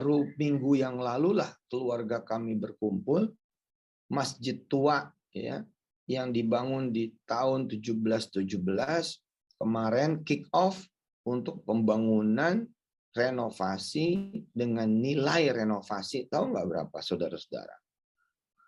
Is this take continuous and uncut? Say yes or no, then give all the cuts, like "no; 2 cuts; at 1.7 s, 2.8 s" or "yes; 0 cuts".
yes; 0 cuts